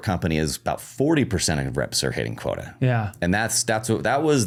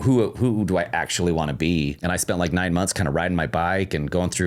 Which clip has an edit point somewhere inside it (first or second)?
second